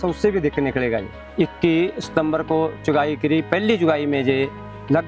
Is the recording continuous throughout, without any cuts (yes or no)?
no